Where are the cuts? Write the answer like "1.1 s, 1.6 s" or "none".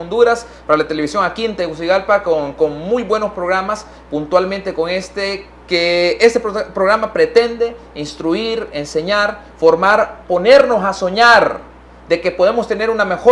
none

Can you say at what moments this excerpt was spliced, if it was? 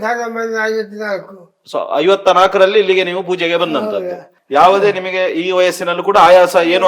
4.3 s

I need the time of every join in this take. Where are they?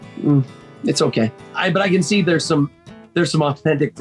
1.5 s

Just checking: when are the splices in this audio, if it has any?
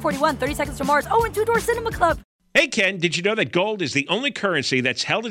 2.3 s

